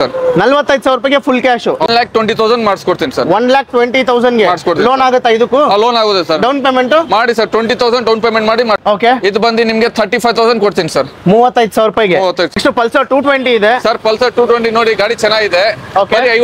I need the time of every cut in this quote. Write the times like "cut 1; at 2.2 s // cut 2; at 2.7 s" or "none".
cut 1; at 1.9 s // cut 2; at 8.8 s // cut 3; at 12.6 s